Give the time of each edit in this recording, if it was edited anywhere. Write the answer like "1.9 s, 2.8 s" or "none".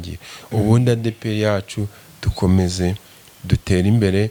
none